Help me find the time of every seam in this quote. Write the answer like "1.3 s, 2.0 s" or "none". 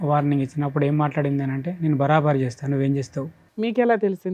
3.4 s